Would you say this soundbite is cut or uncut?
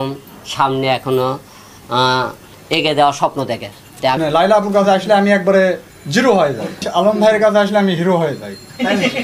cut